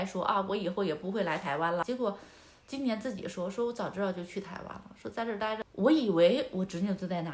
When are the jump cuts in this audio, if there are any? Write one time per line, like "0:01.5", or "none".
0:01.8
0:05.6